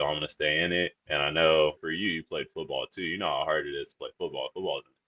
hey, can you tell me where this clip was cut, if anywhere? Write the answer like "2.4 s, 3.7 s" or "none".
1.0 s